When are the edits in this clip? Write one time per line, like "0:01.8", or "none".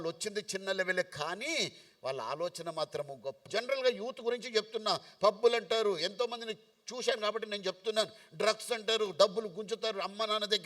0:03.4